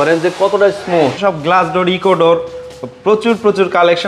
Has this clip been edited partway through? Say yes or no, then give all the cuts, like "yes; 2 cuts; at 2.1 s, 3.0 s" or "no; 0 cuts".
yes; 1 cut; at 1.2 s